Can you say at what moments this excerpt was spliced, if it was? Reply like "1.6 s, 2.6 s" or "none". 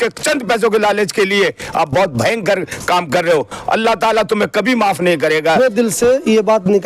5.5 s